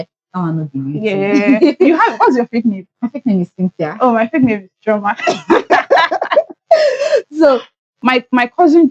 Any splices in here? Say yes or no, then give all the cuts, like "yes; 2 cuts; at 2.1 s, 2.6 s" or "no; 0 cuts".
yes; 1 cut; at 7.8 s